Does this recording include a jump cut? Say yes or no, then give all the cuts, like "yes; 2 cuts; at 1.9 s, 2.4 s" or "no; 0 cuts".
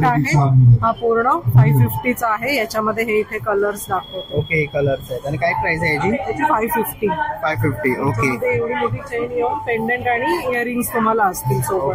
no; 0 cuts